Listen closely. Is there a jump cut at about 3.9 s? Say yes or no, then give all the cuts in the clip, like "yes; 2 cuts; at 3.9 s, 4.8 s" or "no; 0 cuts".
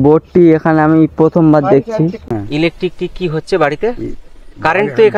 no; 1 cut; at 2.2 s